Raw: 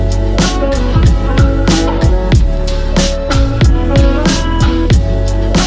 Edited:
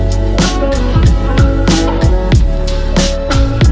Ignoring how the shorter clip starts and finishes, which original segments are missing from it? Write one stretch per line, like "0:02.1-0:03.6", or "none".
none